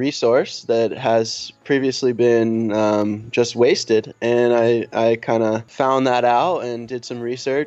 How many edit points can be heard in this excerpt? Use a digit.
1